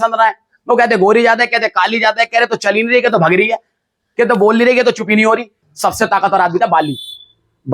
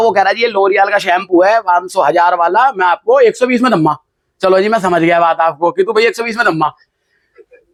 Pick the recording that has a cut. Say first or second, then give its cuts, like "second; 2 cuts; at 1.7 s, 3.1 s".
first; 1 cut; at 5.6 s